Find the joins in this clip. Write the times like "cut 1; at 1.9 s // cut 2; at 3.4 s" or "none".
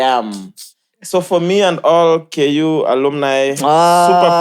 none